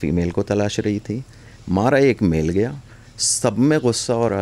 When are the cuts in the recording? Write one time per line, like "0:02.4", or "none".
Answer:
none